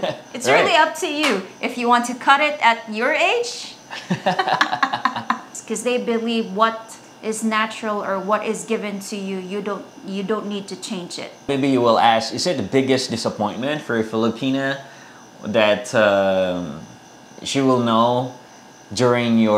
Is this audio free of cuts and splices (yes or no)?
no